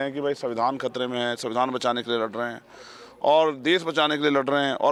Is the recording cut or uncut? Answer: uncut